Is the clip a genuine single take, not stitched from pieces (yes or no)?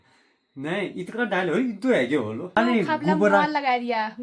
no